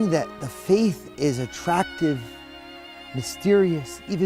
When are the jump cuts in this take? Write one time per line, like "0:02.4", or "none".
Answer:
none

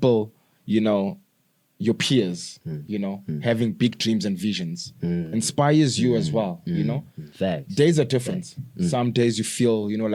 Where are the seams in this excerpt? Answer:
none

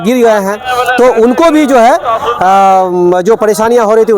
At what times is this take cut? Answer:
none

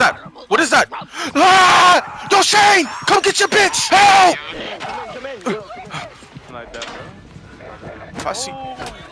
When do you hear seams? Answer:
0:03.8
0:06.5

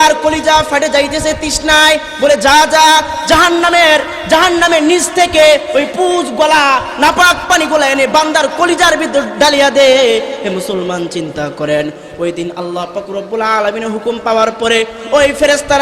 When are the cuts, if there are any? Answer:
none

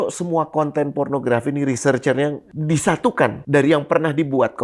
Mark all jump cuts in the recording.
0:02.5
0:03.4

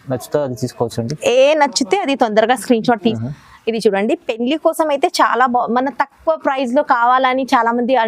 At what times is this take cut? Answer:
0:03.1

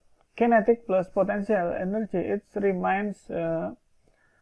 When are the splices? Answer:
none

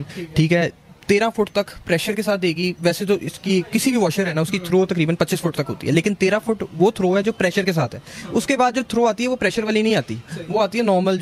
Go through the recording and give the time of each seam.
none

